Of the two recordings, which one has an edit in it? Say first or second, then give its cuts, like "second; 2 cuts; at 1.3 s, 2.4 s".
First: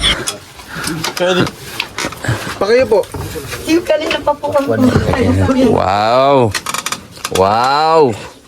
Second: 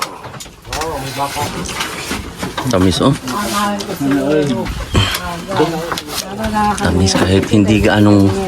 second; 1 cut; at 1.5 s